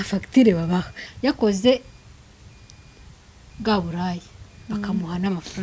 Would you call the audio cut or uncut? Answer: cut